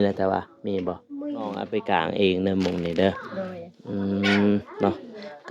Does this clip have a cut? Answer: yes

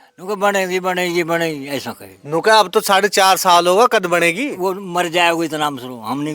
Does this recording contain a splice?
no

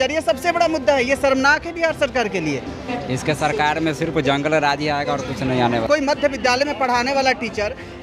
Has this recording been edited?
yes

